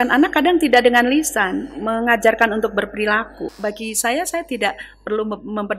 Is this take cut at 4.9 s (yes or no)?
no